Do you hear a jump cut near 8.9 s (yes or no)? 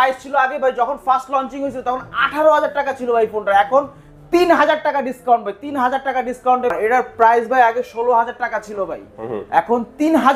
no